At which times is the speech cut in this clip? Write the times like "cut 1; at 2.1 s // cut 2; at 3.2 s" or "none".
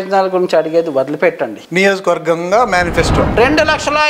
cut 1; at 1.6 s // cut 2; at 3.3 s